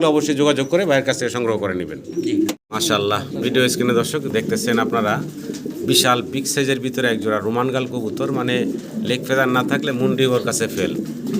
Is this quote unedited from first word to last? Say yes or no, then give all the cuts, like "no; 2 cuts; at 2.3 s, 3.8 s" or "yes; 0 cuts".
no; 1 cut; at 2.6 s